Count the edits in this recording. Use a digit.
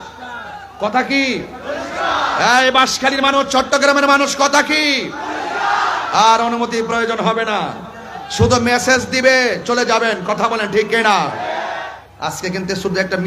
1